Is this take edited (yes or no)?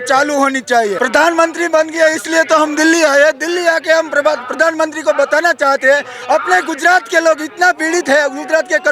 yes